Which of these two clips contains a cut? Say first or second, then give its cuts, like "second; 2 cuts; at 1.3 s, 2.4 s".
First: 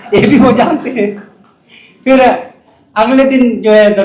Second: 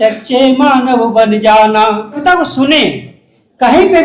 second; 1 cut; at 2.2 s